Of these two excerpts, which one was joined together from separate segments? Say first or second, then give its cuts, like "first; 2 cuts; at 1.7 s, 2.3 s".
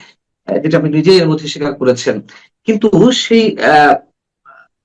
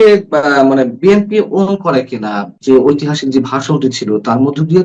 second; 1 cut; at 2.5 s